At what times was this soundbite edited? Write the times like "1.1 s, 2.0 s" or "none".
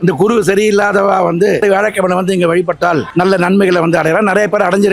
1.6 s, 3.1 s